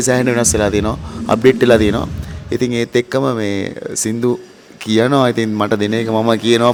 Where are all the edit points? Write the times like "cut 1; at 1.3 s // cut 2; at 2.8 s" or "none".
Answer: none